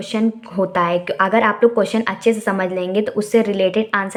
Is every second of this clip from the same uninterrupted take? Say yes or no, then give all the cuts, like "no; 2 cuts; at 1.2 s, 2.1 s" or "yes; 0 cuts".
yes; 0 cuts